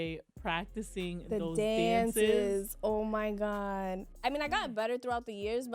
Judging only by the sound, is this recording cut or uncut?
cut